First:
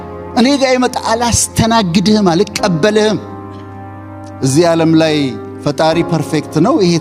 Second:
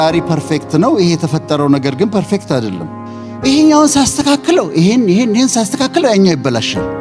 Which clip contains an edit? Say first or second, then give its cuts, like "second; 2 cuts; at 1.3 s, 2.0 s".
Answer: first; 1 cut; at 3.9 s